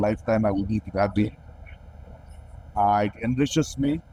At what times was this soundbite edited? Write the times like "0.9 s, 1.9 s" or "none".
none